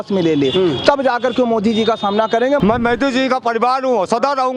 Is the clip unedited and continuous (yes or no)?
no